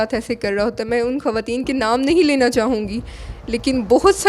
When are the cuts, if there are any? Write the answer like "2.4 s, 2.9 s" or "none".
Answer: none